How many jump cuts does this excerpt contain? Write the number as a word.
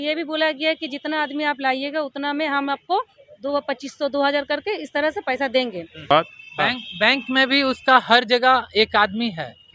one